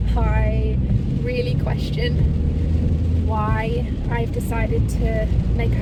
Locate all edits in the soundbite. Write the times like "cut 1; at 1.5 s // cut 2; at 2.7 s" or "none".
none